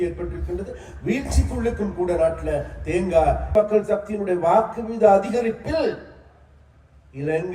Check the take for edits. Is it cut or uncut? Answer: cut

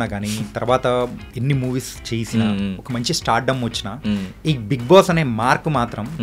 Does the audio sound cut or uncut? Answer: uncut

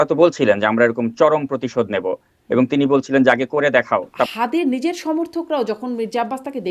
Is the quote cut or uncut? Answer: cut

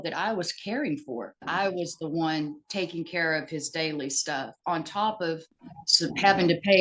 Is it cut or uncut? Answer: cut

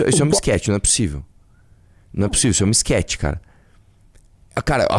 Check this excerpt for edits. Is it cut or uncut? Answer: uncut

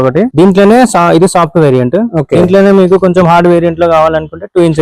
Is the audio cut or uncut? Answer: uncut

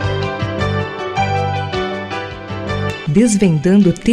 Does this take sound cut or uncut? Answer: uncut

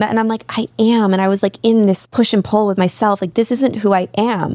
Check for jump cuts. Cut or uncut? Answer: cut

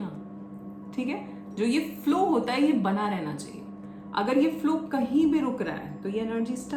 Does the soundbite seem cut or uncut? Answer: uncut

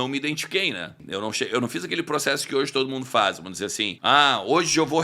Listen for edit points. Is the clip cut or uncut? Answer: cut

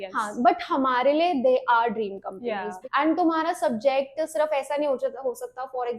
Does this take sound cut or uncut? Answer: cut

